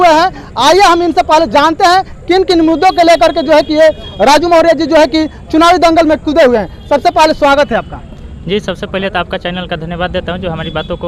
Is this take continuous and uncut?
yes; 0 cuts

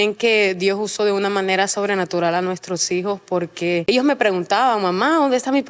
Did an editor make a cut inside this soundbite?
yes; 1 cut; at 3.8 s

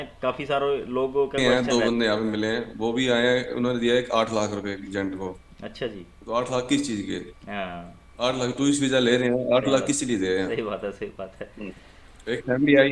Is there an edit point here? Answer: yes; 1 cut; at 1.4 s

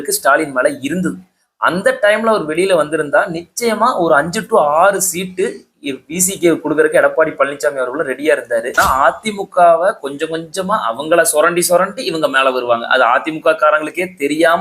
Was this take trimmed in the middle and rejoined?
yes; 1 cut; at 8.8 s

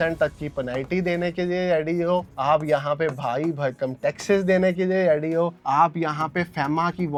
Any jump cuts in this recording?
no; 0 cuts

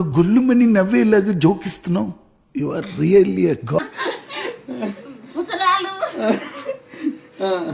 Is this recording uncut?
yes; 0 cuts

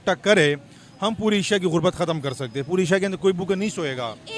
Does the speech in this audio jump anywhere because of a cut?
no; 0 cuts

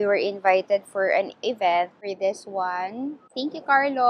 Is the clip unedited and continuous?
no; 2 cuts; at 2.0 s, 3.3 s

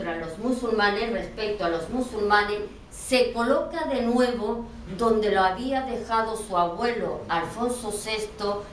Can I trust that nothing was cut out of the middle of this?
no; 1 cut; at 2.4 s

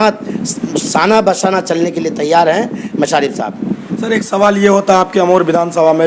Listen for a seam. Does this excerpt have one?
no; 0 cuts

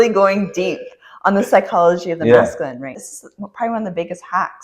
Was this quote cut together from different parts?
yes; 1 cut; at 3.0 s

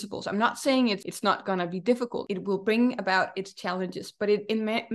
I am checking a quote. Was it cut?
yes; 2 cuts; at 1.0 s, 2.2 s

